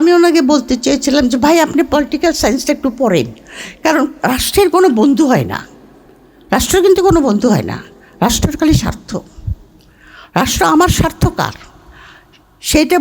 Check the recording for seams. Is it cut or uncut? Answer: uncut